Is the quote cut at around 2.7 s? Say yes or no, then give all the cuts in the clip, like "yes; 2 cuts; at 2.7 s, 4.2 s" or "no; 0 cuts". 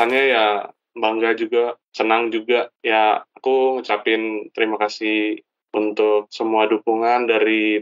yes; 2 cuts; at 1.8 s, 2.7 s